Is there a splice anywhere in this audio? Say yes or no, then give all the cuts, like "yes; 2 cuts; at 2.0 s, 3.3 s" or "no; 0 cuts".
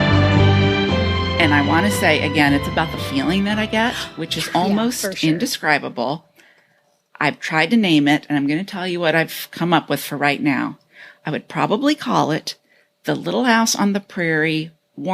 yes; 1 cut; at 1.4 s